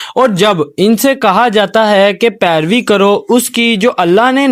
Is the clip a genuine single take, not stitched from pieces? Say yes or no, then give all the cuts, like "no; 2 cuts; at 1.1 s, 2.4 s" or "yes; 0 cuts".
yes; 0 cuts